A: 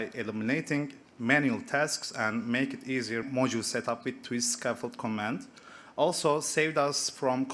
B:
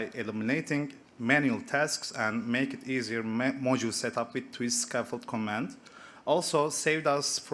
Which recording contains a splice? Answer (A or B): A